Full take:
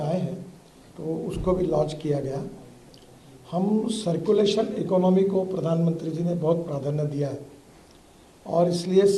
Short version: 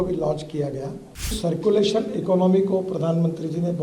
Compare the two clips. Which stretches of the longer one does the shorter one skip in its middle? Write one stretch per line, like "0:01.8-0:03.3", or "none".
0:02.9-0:04.0